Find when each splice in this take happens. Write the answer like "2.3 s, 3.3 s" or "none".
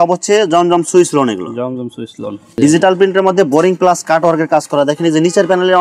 2.4 s

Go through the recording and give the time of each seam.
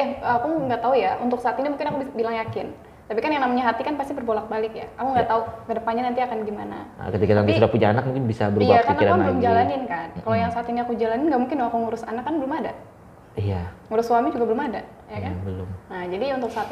none

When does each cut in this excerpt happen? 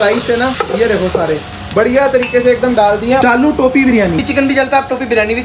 3.2 s, 4.2 s

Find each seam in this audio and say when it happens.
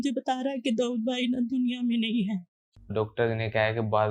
2.8 s

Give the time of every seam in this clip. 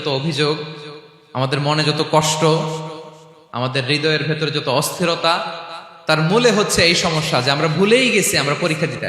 none

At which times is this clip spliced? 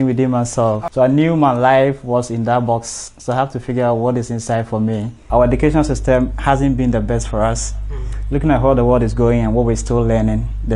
0.9 s, 5.2 s

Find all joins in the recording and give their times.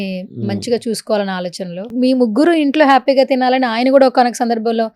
1.9 s

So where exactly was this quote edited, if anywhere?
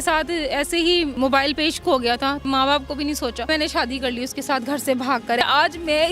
1.1 s, 2.4 s, 3.5 s, 5.4 s

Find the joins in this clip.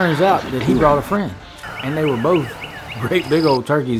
none

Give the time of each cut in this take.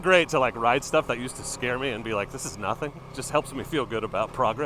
3.1 s

